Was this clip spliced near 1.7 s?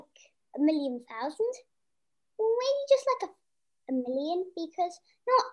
no; 0 cuts

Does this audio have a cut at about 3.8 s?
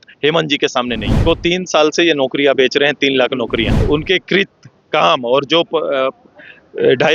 yes; 2 cuts; at 1.2 s, 3.8 s

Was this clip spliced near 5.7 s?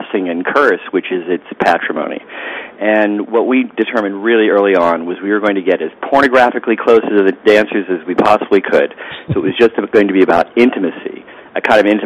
no; 0 cuts

